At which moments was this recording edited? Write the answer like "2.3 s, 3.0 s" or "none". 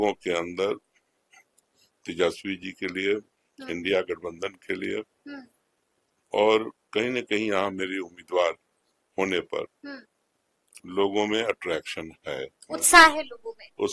none